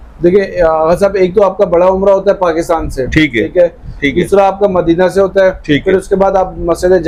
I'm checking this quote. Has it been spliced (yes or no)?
no